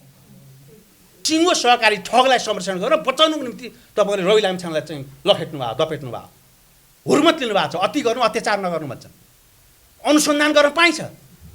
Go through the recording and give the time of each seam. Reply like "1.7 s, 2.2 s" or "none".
1.1 s

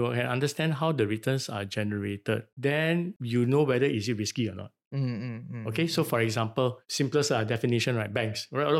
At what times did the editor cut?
none

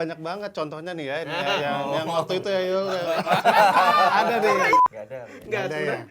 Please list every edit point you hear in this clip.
4.8 s

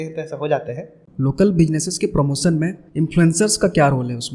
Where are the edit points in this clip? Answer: 1.0 s, 2.8 s

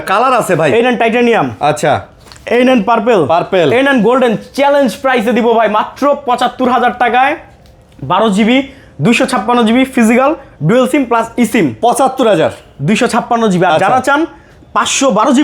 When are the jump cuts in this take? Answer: none

